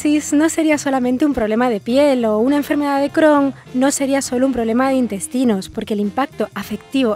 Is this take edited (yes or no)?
yes